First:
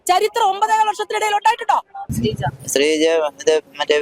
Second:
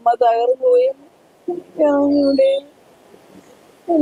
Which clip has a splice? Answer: first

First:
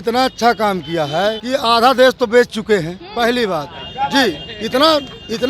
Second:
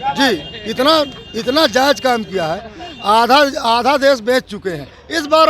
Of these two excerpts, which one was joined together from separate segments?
first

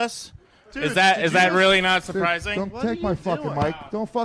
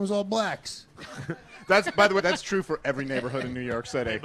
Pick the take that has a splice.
first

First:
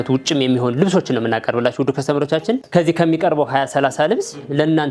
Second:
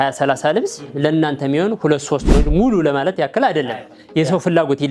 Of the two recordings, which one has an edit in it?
first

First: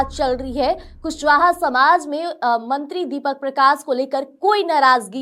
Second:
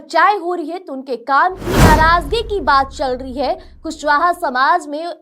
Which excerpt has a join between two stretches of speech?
second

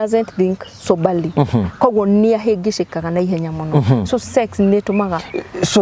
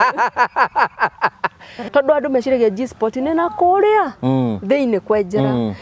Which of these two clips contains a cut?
second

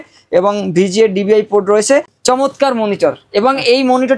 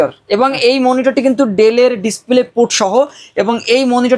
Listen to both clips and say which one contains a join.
first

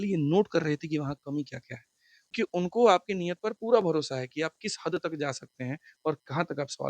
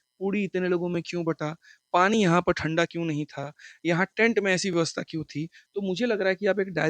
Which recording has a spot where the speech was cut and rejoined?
first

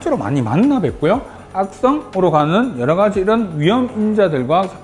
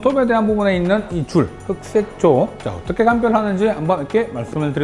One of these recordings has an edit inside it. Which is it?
first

